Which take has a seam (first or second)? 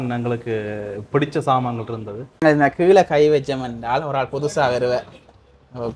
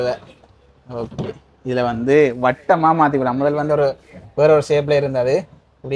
first